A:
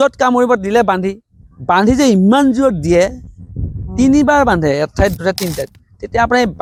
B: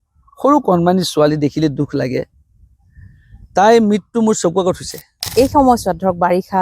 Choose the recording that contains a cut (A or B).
B